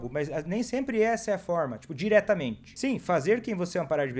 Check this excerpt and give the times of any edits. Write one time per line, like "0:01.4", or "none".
0:02.6